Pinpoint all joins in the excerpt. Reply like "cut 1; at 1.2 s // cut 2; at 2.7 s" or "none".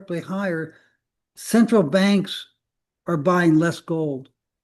none